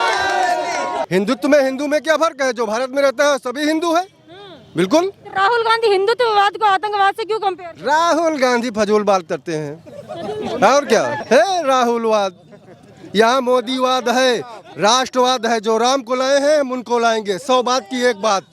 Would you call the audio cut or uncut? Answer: cut